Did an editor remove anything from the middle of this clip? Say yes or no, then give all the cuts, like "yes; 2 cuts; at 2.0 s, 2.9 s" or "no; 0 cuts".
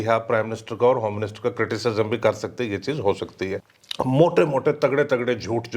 yes; 1 cut; at 3.7 s